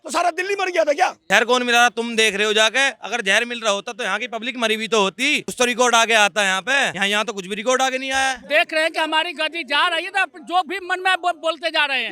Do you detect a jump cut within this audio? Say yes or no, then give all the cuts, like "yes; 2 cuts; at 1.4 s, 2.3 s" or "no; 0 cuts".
yes; 4 cuts; at 1.2 s, 5.5 s, 7.0 s, 8.4 s